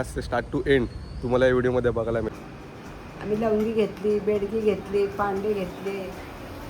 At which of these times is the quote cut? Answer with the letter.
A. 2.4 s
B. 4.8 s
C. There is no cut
A